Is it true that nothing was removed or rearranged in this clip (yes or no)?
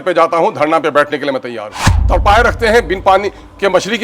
no